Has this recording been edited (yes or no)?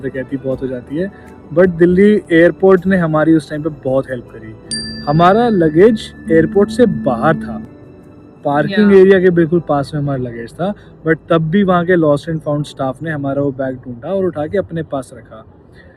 no